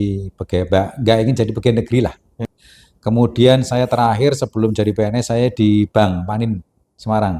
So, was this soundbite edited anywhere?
yes; 1 cut; at 2.5 s

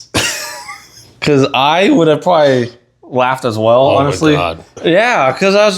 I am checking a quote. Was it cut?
yes; 1 cut; at 4.8 s

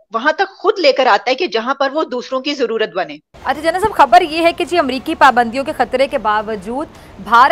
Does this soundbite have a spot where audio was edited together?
yes; 1 cut; at 3.2 s

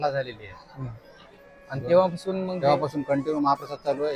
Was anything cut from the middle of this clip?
no; 0 cuts

